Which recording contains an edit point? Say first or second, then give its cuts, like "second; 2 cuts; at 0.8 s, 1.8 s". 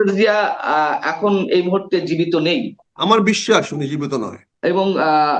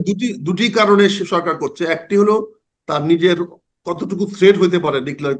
first; 2 cuts; at 2.8 s, 4.4 s